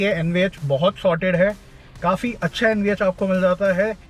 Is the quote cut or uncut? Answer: uncut